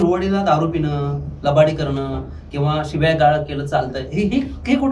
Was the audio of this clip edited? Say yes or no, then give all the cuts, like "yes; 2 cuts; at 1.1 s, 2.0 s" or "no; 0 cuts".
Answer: no; 0 cuts